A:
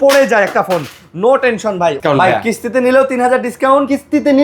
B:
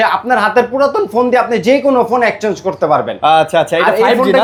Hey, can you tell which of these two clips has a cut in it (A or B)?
A